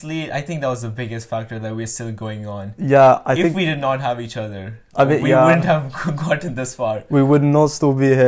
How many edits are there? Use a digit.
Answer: 0